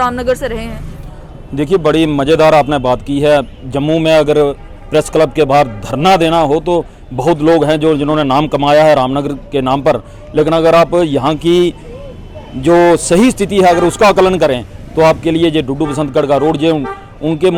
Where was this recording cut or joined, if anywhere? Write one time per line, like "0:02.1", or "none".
none